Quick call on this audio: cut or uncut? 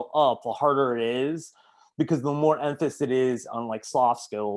uncut